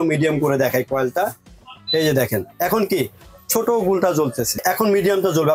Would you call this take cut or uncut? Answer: cut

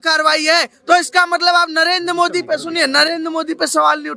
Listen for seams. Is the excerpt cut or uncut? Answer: uncut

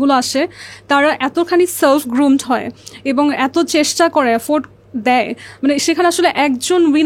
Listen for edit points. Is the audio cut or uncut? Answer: uncut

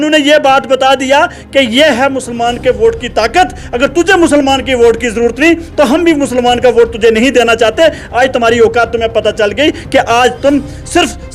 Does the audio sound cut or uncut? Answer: uncut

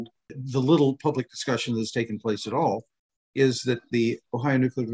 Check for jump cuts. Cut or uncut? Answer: uncut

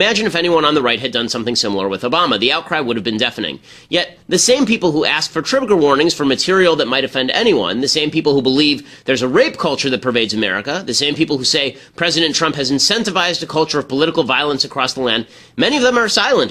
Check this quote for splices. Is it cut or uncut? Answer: cut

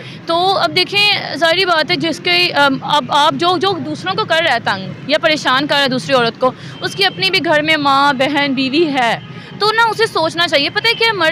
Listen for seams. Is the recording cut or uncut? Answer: uncut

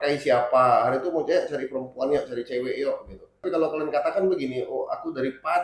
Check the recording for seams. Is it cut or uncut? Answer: cut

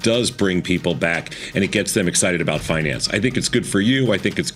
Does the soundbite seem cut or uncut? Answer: uncut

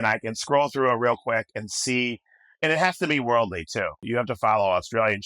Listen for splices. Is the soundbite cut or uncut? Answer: cut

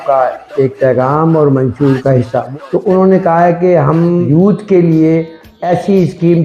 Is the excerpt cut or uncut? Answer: cut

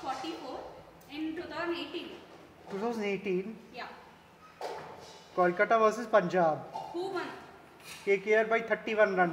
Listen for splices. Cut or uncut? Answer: uncut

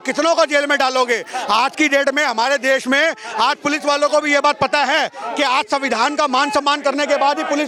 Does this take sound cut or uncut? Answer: uncut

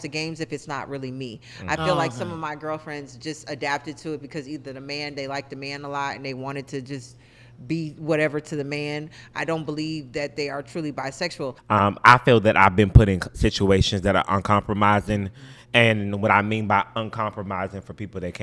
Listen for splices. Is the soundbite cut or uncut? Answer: cut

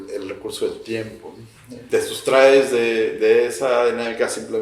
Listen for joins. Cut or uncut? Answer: cut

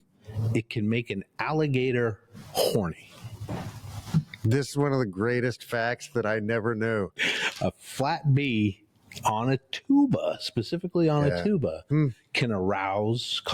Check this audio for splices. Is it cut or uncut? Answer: uncut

